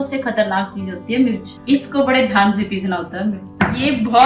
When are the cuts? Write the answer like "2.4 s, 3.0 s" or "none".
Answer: 1.5 s, 3.5 s